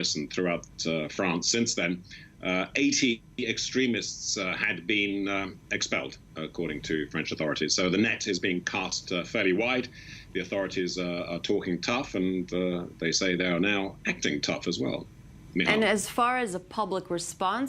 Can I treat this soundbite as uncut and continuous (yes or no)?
no